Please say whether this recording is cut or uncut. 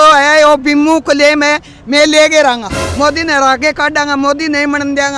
cut